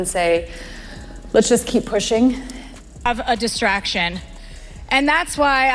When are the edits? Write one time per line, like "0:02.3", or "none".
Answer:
0:03.1